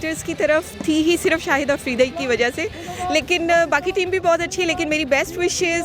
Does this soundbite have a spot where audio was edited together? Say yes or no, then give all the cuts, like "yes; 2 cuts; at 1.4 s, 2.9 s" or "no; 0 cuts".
no; 0 cuts